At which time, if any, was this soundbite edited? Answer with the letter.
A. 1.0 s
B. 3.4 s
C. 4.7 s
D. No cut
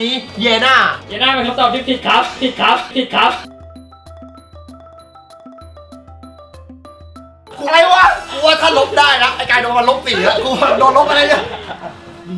D